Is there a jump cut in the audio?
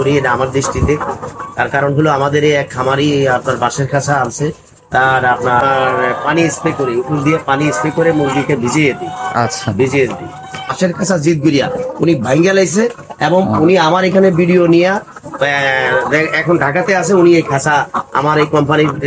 yes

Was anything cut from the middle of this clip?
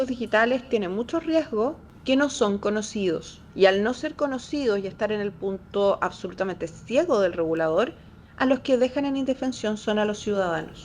yes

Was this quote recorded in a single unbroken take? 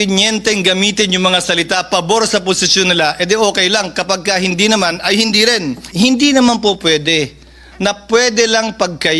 no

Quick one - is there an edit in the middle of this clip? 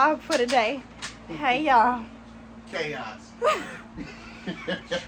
no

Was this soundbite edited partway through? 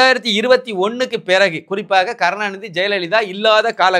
no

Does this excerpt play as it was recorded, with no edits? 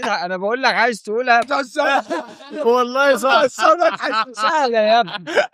no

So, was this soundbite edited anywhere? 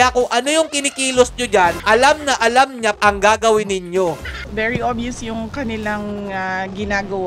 yes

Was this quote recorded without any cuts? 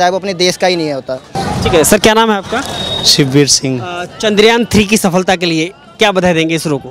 yes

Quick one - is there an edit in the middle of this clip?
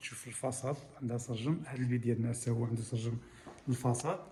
no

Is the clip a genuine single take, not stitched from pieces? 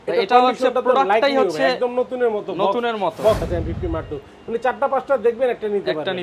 no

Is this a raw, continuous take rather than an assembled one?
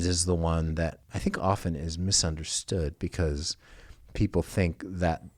no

